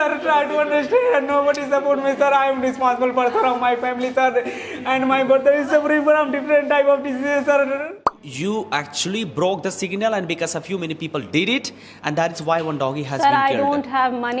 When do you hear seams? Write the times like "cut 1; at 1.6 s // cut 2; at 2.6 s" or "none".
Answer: cut 1; at 8.3 s

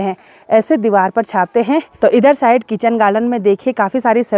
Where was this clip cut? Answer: cut 1; at 1.9 s

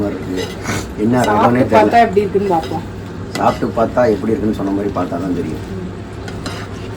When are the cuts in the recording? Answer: none

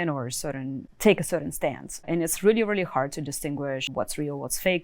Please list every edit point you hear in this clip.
cut 1; at 0.8 s // cut 2; at 2.1 s // cut 3; at 3.9 s

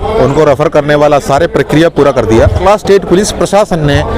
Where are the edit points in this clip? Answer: cut 1; at 2.6 s

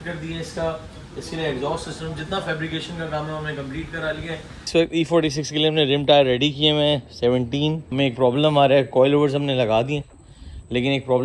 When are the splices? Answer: cut 1; at 4.7 s // cut 2; at 7.8 s

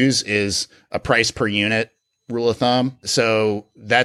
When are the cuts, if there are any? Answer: cut 1; at 3.0 s

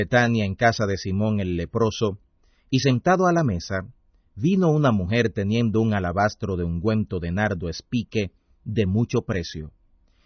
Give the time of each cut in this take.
cut 1; at 1.7 s

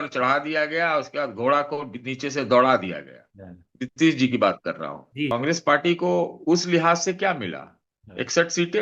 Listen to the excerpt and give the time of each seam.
cut 1; at 5.3 s

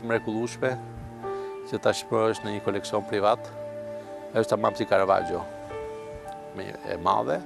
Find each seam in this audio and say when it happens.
none

